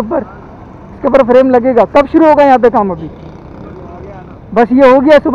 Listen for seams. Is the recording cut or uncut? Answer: uncut